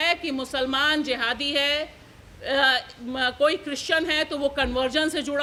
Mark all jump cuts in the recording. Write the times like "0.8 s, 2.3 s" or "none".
none